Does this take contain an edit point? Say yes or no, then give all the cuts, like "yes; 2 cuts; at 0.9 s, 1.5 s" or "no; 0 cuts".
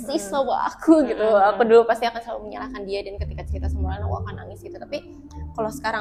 no; 0 cuts